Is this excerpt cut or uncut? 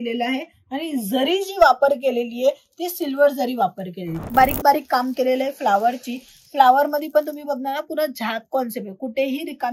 cut